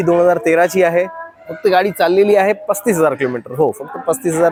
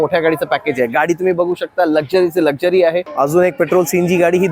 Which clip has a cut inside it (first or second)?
second